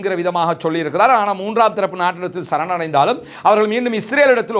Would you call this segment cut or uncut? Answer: uncut